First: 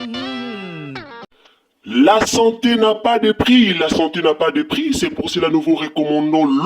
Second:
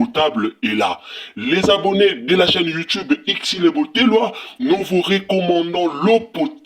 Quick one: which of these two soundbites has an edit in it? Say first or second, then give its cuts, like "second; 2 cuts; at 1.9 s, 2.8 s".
first; 1 cut; at 1.2 s